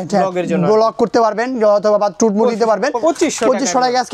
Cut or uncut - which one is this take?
cut